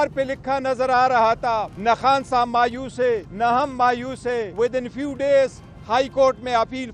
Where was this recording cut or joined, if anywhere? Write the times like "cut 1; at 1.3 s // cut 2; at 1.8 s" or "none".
cut 1; at 1.7 s // cut 2; at 3.3 s // cut 3; at 4.5 s